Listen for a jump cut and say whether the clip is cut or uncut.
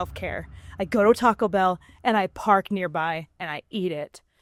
uncut